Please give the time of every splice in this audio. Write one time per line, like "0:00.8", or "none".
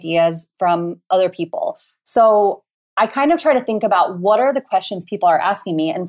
none